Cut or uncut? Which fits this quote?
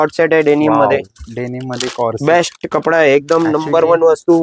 uncut